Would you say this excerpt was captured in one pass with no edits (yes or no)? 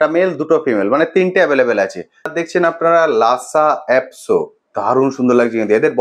no